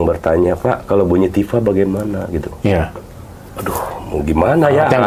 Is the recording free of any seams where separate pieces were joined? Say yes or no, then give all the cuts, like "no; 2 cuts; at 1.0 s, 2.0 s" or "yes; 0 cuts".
yes; 0 cuts